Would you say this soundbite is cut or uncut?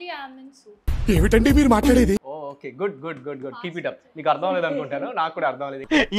cut